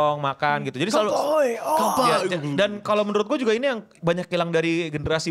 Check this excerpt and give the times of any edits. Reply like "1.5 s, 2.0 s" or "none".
none